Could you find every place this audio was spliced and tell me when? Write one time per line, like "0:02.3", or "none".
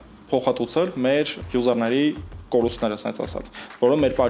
0:01.4